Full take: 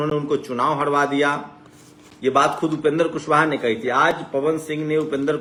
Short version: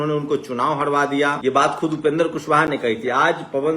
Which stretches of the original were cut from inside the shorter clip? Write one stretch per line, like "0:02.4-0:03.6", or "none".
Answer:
0:01.4-0:02.2